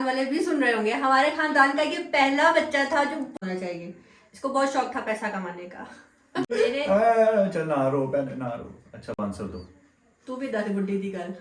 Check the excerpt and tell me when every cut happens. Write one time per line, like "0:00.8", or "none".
0:03.3
0:06.4